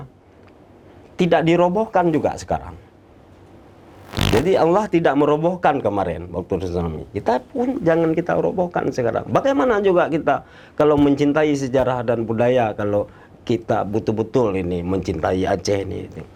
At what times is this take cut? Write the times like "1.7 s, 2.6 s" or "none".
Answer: none